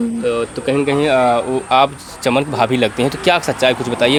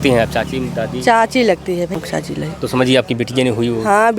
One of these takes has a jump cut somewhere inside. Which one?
second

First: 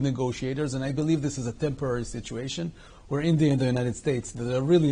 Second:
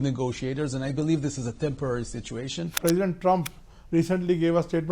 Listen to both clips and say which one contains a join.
second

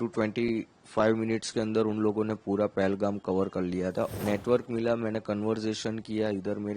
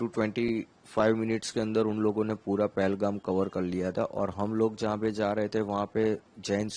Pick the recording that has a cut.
first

